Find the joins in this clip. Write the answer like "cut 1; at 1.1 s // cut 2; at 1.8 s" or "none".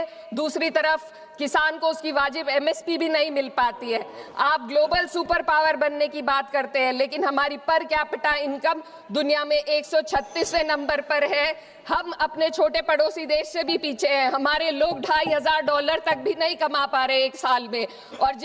none